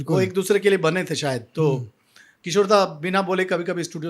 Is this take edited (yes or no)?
no